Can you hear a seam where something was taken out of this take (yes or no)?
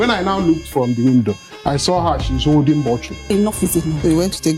yes